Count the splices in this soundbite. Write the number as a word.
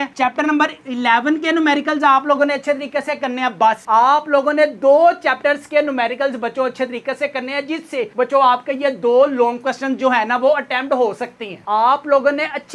one